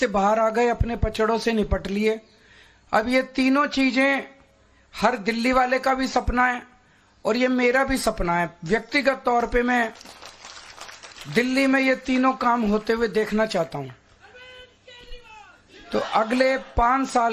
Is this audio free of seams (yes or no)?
yes